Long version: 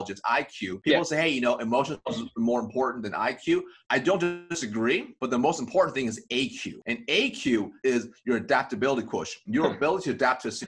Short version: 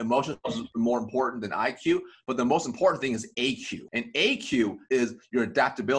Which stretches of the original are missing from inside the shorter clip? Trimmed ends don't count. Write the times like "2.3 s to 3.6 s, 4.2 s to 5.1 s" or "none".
3.8 s to 5.1 s